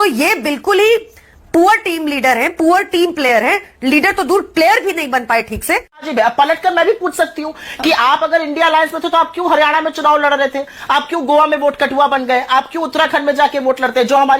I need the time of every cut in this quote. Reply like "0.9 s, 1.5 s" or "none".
6.1 s